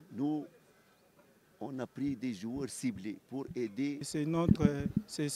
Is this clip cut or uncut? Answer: cut